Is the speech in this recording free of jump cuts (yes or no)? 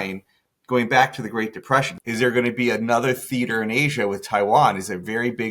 no